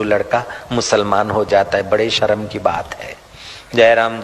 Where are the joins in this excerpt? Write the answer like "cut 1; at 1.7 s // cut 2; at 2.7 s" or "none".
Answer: none